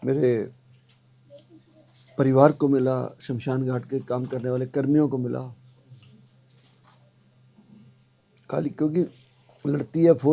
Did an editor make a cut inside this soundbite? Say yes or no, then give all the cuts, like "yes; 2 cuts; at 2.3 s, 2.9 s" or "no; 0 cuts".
no; 0 cuts